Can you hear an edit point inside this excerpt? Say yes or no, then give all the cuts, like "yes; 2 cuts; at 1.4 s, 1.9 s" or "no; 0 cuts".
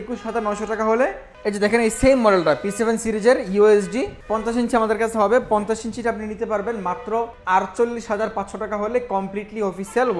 yes; 3 cuts; at 1.3 s, 4.2 s, 7.4 s